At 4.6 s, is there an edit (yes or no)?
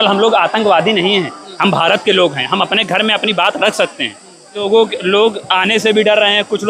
yes